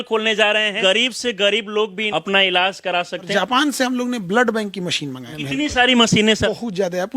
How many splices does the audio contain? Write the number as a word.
five